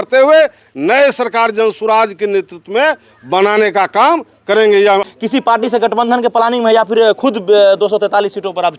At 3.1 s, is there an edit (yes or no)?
no